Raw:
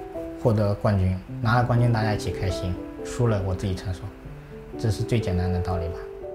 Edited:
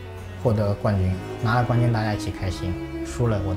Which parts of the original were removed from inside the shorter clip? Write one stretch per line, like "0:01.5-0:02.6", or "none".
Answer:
none